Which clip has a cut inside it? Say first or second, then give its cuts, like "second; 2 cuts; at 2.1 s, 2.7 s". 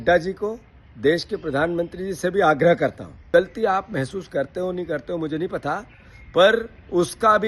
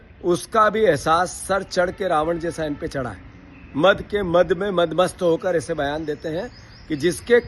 first; 1 cut; at 3.2 s